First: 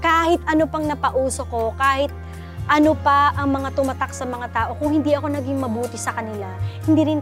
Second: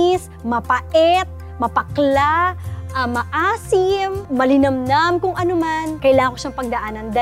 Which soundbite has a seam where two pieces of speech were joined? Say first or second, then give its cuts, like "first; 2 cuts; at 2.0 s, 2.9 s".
second; 2 cuts; at 4.2 s, 5.9 s